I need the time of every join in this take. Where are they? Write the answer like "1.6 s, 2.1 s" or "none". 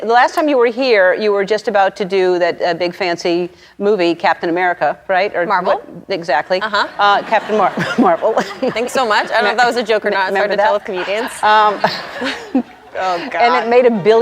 8.5 s, 12.8 s